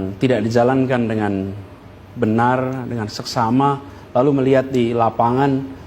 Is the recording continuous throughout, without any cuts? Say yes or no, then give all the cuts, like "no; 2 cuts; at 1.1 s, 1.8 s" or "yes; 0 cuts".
yes; 0 cuts